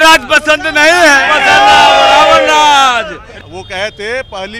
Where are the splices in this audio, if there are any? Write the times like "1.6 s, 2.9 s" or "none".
3.3 s